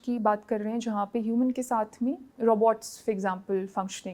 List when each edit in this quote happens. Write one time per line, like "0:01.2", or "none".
0:02.3